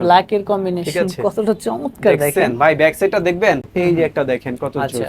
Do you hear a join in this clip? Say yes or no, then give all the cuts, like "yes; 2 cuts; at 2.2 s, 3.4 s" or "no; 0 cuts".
yes; 1 cut; at 3.7 s